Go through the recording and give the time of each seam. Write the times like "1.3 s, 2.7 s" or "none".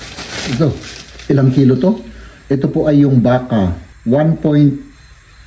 3.9 s